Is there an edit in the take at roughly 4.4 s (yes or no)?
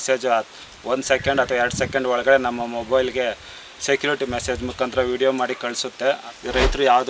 no